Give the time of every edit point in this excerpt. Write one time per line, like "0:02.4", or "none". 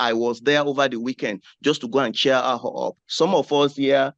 none